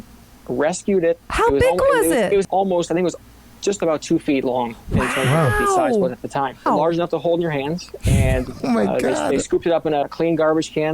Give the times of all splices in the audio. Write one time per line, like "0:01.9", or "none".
0:02.4
0:06.6
0:10.0